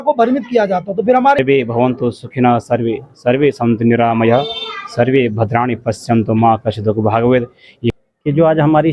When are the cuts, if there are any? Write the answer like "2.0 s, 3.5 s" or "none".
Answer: 1.4 s, 7.9 s

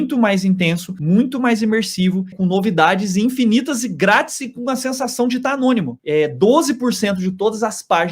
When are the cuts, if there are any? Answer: 2.3 s, 6.0 s

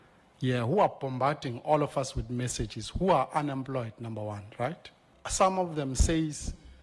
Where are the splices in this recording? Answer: 5.2 s

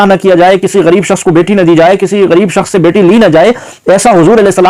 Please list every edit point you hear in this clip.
none

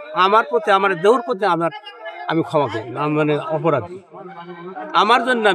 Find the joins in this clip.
none

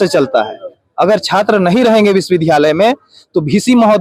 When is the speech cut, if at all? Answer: none

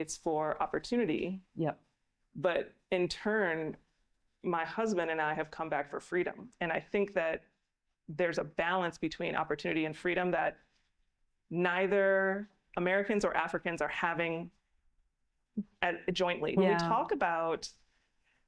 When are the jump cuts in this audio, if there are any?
16.5 s

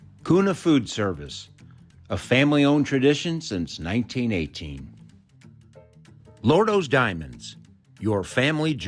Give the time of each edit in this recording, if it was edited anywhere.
4.8 s, 6.4 s

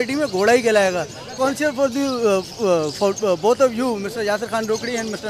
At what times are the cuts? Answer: 1.4 s

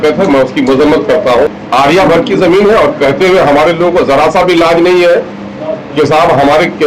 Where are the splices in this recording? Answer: 1.6 s

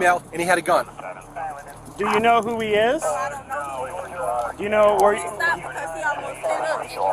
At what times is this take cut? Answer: none

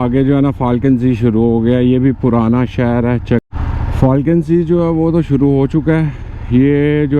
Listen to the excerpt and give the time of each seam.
3.4 s

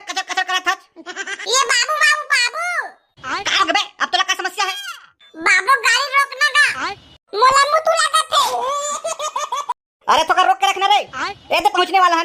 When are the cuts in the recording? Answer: 1.4 s

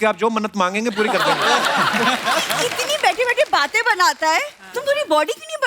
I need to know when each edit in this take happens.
2.7 s

